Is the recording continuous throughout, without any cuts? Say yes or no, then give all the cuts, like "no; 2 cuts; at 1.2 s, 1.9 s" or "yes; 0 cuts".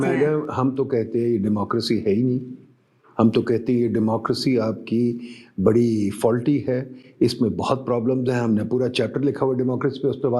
yes; 0 cuts